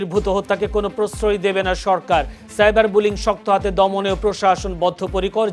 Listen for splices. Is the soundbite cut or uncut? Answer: uncut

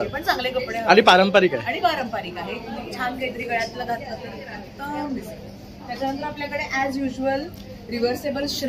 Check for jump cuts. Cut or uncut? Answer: uncut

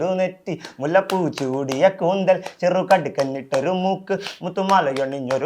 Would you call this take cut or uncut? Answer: uncut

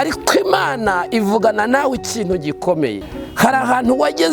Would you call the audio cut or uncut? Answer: cut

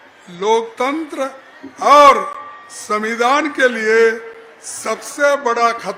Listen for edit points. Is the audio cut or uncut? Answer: uncut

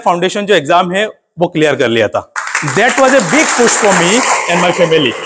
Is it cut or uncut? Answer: uncut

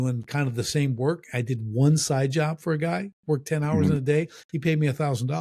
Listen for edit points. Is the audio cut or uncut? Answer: uncut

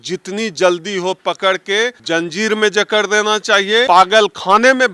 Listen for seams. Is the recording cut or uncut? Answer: cut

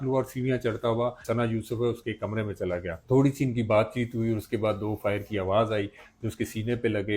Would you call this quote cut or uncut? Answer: cut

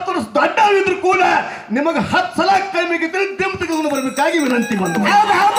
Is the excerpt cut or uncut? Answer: uncut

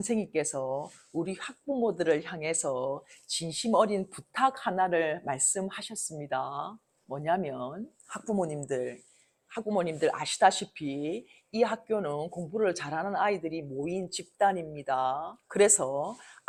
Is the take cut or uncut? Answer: uncut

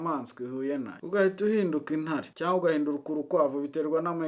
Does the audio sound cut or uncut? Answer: cut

